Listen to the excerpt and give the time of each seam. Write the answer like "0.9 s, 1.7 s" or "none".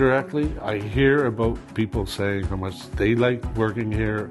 2.8 s, 3.5 s